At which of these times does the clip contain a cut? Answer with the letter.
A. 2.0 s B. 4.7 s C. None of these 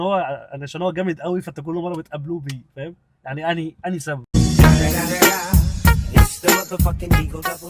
C